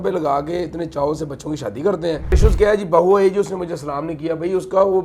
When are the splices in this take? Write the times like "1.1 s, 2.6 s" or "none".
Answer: 2.3 s